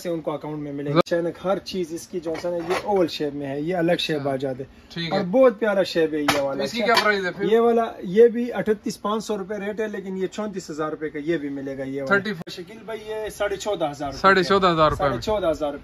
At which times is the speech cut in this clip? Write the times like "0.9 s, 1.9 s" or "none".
1.0 s, 12.4 s